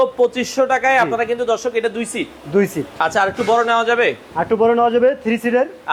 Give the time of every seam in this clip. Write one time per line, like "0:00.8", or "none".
none